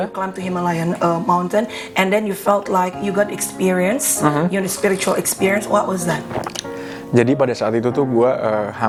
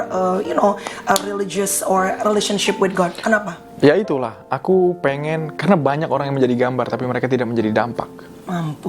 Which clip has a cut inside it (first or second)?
second